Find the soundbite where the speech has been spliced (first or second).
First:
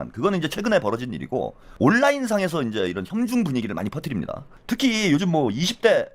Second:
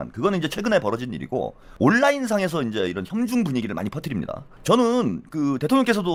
first